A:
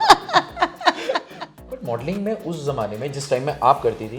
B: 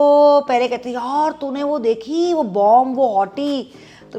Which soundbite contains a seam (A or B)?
A